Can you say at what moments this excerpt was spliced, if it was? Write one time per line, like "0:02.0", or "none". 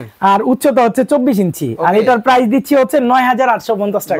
none